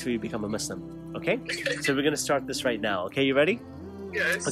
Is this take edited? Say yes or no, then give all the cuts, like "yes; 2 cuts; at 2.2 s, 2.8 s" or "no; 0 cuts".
no; 0 cuts